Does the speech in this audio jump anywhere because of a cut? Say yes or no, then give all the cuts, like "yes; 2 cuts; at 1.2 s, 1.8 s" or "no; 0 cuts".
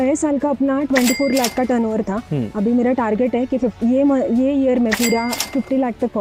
no; 0 cuts